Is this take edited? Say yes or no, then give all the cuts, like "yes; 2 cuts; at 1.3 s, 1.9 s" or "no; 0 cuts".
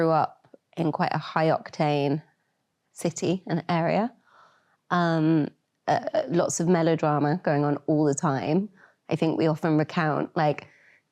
no; 0 cuts